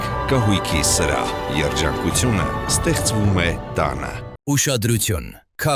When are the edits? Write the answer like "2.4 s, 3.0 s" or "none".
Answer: none